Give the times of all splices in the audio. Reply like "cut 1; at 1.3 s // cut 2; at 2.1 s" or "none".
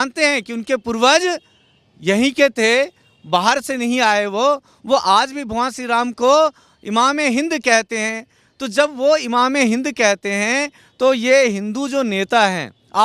none